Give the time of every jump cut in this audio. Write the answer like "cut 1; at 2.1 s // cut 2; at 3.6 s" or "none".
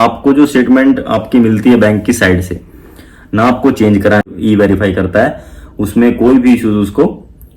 cut 1; at 4.2 s